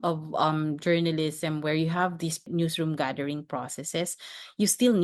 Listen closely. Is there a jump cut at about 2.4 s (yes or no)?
yes